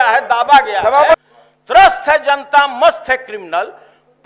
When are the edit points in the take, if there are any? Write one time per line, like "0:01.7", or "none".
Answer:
0:01.2